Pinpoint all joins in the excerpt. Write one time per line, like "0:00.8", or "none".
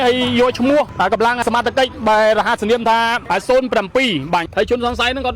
0:01.4
0:03.2
0:04.5